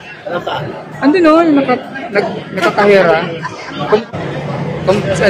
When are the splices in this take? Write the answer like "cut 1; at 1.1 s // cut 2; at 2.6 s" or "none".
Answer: none